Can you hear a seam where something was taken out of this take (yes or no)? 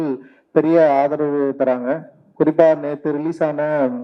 no